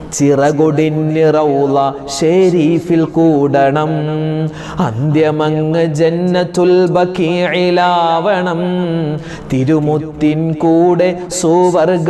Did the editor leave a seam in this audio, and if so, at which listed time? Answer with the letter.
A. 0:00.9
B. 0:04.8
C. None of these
C